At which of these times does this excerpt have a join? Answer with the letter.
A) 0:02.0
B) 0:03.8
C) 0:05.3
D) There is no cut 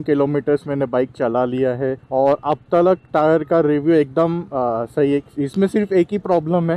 A